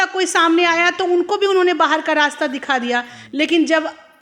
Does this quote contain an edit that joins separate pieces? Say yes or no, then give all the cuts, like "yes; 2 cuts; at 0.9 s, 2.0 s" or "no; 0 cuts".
no; 0 cuts